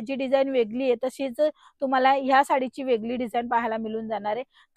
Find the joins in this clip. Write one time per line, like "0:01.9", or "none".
none